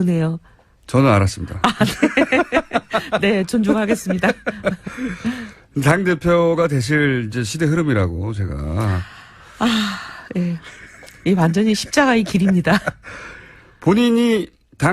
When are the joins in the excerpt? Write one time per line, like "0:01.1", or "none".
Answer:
0:12.5